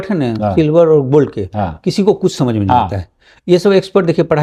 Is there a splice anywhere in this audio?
no; 0 cuts

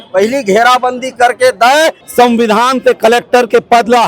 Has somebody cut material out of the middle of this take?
yes; 1 cut; at 2.0 s

